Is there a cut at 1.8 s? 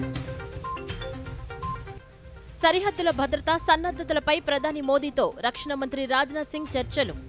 yes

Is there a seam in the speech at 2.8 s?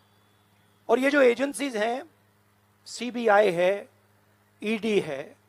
no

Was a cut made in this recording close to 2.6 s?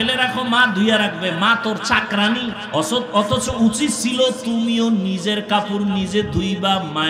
yes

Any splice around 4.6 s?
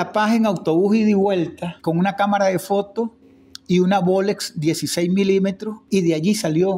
no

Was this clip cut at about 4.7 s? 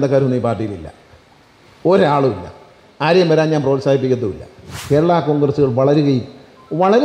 yes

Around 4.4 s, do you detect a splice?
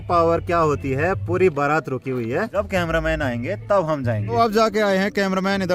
yes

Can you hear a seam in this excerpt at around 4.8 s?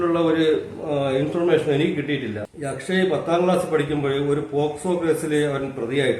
no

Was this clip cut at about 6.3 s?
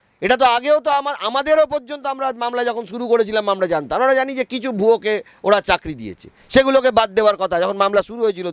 no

